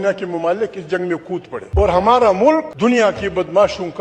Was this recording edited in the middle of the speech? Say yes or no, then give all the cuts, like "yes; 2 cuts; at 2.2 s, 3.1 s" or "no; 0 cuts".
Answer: yes; 2 cuts; at 1.6 s, 2.7 s